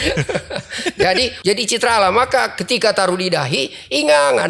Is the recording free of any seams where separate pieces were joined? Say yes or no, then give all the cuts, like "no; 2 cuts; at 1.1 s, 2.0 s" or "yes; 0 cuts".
no; 1 cut; at 1.3 s